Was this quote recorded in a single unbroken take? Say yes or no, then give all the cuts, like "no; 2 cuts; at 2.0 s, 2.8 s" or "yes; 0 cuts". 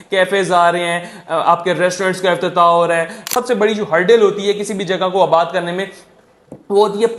no; 1 cut; at 3.4 s